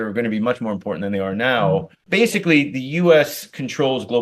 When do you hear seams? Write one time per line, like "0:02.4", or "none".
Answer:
0:02.0